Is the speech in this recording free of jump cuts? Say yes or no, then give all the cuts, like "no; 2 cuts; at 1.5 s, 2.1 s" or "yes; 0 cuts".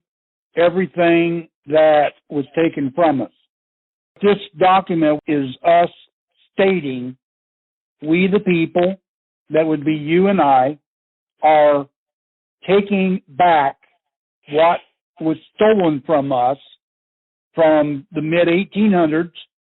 no; 2 cuts; at 4.2 s, 5.2 s